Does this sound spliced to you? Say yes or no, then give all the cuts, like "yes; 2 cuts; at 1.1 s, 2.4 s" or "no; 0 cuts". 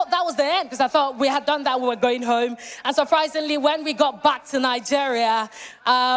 no; 0 cuts